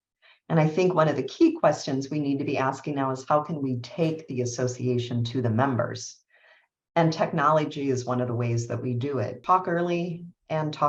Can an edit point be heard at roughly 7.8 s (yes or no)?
no